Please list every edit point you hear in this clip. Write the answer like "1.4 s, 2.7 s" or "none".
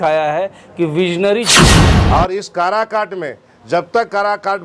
1.7 s